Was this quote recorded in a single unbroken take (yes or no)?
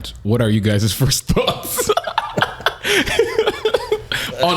yes